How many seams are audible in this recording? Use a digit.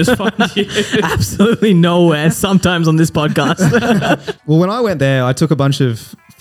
1